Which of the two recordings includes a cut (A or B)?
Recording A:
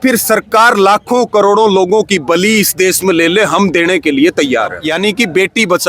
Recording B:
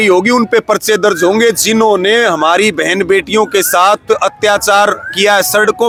A